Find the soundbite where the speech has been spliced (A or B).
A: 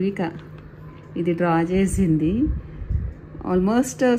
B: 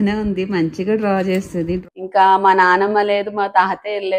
B